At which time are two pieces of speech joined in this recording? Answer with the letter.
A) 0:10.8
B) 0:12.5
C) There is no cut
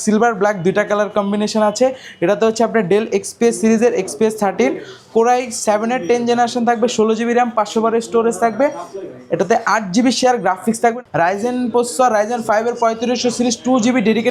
A